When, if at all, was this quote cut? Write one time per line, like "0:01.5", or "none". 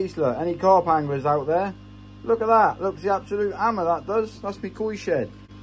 none